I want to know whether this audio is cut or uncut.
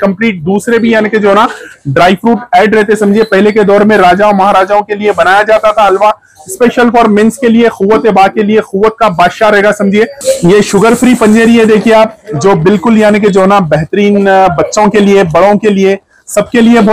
cut